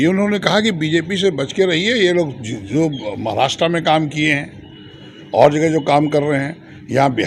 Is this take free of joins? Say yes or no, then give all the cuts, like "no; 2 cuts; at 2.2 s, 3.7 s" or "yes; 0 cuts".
yes; 0 cuts